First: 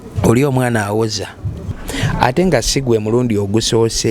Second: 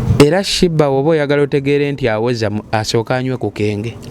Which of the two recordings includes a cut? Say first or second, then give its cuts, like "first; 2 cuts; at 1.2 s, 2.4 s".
first; 1 cut; at 1.7 s